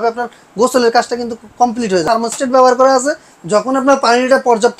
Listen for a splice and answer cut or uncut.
cut